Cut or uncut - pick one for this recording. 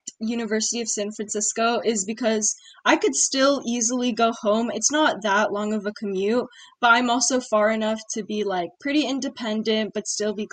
uncut